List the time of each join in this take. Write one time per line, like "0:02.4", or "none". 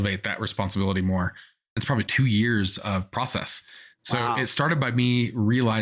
0:02.1